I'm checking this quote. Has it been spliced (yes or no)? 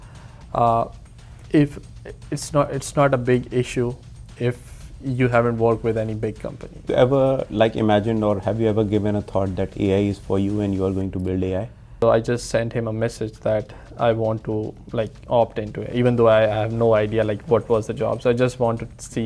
yes